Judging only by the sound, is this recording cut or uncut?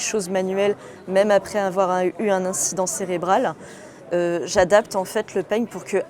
uncut